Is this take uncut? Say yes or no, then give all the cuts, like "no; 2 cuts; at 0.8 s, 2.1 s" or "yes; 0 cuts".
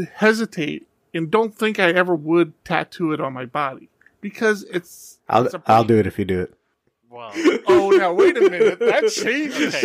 yes; 0 cuts